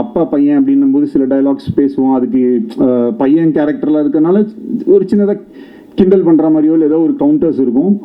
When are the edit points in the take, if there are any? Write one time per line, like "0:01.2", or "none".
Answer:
none